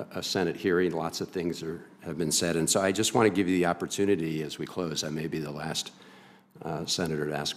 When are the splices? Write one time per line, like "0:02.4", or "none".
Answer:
0:04.2